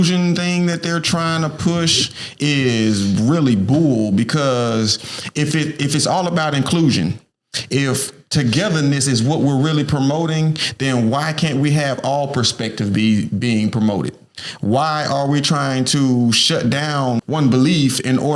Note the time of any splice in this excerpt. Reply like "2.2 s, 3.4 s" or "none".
17.2 s

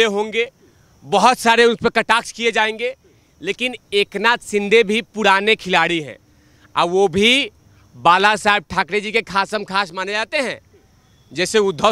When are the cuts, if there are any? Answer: none

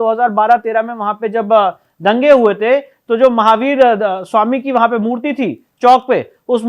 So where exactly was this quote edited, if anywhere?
none

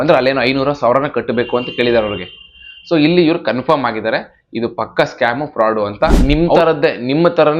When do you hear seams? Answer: 6.2 s

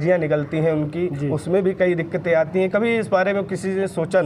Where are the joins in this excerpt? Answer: none

